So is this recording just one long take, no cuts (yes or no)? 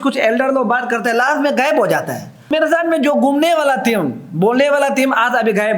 no